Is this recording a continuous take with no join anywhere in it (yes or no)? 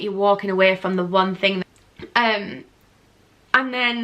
no